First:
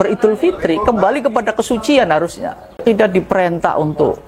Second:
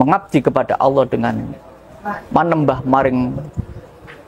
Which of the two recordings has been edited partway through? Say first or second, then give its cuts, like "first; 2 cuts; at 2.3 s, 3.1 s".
first; 1 cut; at 2.8 s